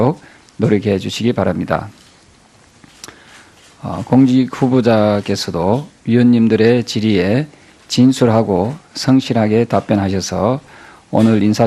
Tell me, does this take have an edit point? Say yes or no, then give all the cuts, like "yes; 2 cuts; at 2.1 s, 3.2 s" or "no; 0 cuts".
yes; 1 cut; at 6.4 s